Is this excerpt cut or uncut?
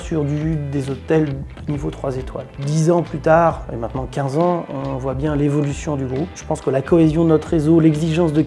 uncut